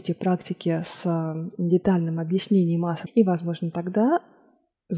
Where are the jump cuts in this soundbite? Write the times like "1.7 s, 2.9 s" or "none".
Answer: 3.0 s

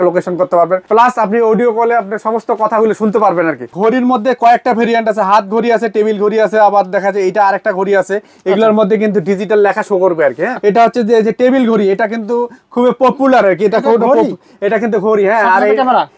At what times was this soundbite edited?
3.7 s, 10.5 s

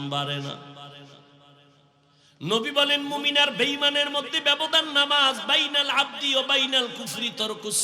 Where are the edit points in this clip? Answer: 1.8 s

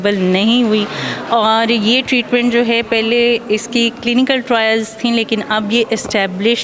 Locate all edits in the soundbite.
none

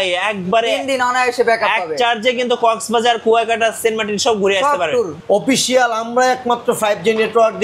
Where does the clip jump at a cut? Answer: 5.1 s

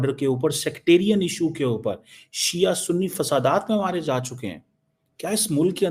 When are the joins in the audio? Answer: none

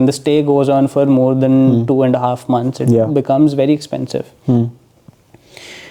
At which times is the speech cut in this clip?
none

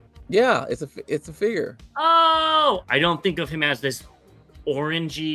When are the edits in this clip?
2.8 s

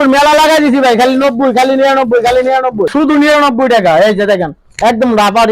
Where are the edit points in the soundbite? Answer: 2.9 s

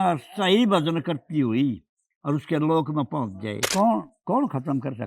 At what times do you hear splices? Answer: 3.6 s

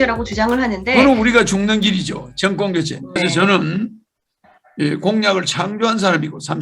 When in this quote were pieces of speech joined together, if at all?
3.2 s

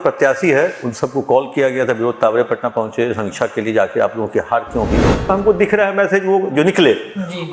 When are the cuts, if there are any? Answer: 5.3 s

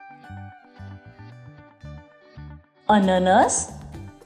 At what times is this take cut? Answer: none

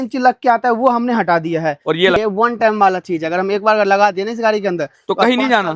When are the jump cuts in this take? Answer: 2.2 s

